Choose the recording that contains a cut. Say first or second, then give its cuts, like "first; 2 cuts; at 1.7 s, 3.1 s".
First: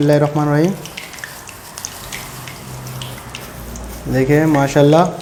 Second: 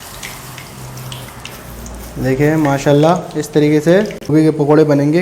second; 1 cut; at 4.3 s